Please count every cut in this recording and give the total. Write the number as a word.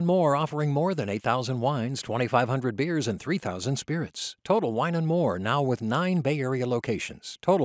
zero